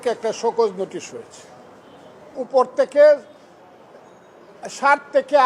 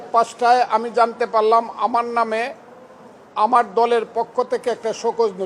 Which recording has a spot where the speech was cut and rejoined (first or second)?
first